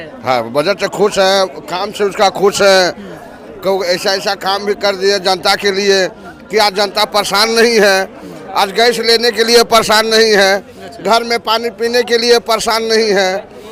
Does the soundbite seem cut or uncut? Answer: uncut